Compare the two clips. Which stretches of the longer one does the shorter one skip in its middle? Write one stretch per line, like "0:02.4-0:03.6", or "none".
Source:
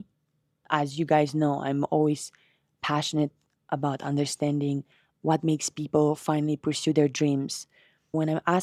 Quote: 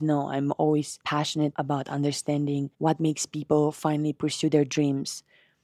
0:02.7-0:03.5
0:04.9-0:05.2